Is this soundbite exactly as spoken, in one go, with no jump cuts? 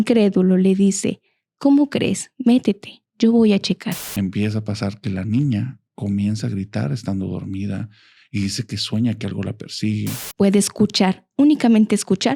no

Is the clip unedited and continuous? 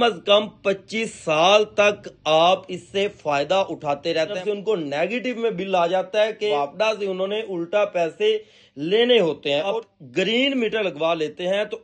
no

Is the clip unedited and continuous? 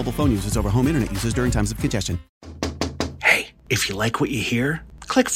no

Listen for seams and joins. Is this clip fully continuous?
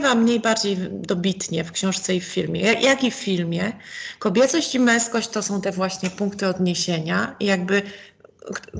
yes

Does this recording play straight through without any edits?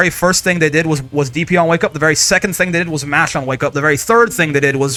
yes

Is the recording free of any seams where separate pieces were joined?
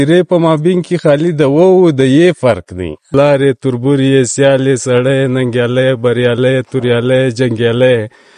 no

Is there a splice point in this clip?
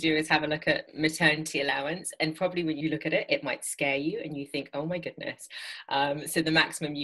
yes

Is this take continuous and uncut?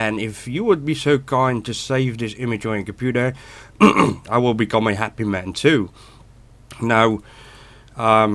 no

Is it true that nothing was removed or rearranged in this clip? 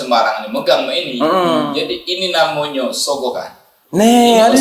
yes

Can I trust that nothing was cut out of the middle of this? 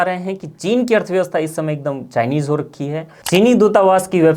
no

